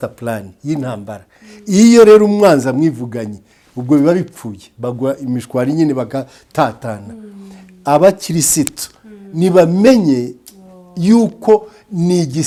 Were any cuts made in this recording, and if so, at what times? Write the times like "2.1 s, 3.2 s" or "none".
none